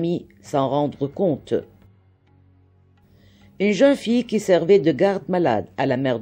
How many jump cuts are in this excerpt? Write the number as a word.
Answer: two